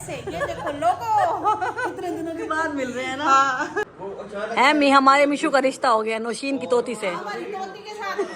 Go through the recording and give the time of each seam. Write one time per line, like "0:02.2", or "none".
0:03.9